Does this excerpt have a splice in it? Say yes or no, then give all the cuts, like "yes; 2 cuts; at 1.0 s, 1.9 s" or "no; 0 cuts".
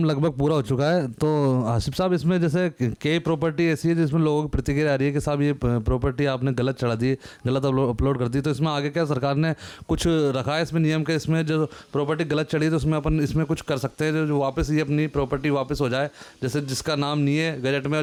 no; 0 cuts